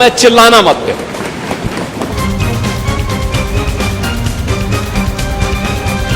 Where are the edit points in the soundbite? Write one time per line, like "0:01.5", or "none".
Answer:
0:02.1